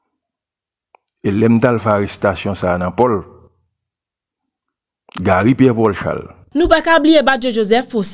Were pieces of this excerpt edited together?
yes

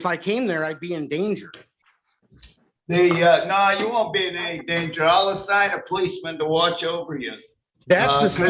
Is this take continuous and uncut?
yes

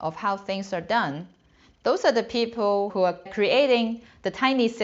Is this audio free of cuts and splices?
no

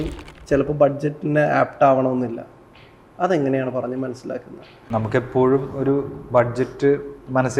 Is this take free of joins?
no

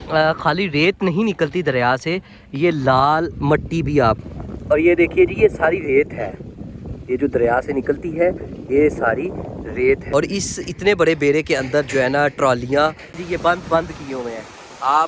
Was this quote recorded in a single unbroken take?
no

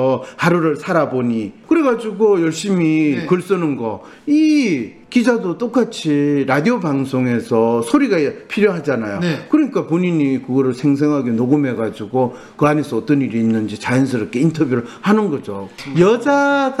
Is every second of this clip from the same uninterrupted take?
no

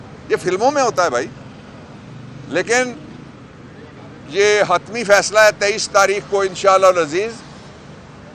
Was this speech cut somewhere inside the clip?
no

